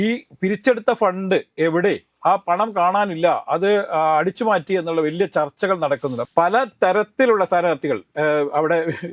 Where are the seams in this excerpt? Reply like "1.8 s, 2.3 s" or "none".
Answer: 6.2 s